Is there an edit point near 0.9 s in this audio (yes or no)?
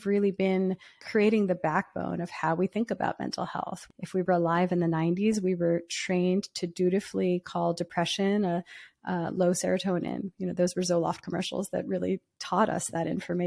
yes